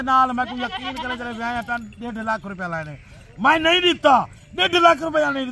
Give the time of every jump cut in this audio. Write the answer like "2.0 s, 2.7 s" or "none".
none